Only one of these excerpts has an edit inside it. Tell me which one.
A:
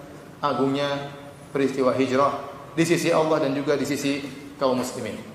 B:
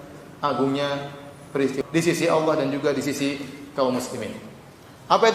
B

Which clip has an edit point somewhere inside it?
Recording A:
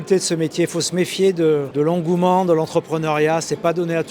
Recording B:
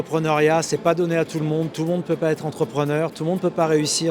A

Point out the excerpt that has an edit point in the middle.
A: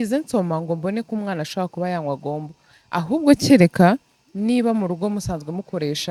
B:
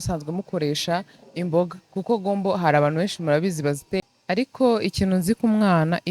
B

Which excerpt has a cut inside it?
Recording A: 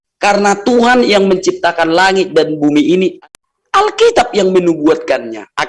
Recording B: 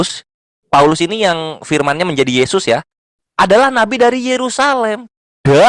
A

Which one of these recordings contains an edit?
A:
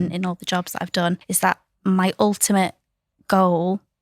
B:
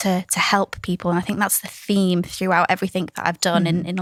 A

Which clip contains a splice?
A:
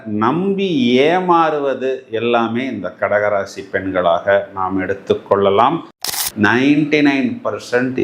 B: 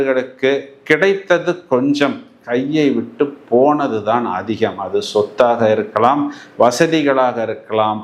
A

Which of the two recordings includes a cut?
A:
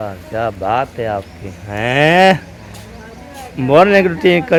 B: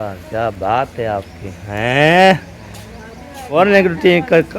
B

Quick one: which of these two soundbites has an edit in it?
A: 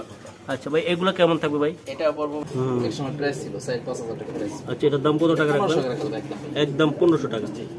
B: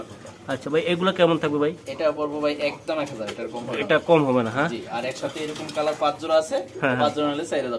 A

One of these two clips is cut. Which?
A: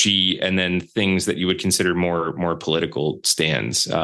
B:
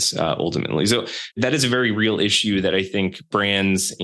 B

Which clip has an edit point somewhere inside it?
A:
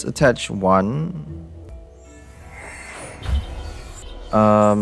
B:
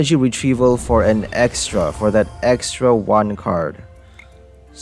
A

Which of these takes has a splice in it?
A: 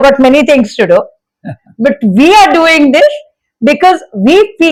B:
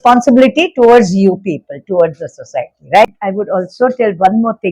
B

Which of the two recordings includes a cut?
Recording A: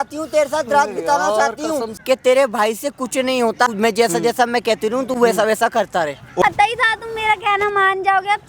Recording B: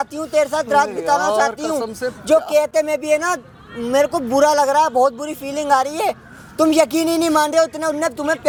A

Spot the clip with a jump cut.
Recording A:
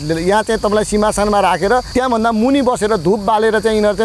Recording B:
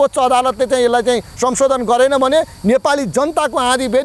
A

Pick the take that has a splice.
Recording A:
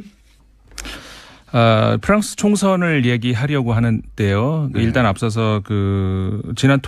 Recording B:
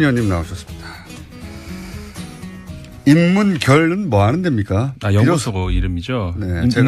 A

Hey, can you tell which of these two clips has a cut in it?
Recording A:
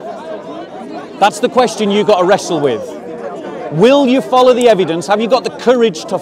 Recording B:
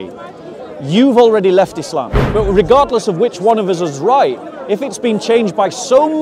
B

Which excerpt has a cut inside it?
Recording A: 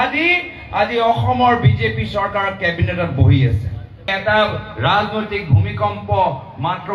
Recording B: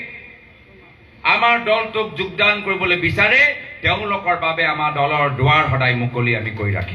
A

